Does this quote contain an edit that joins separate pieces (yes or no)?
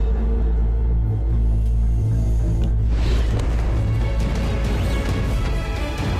no